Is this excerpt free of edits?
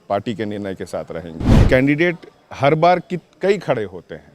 no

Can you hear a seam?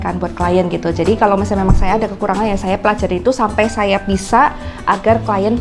no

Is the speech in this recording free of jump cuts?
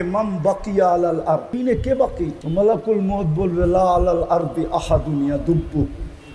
no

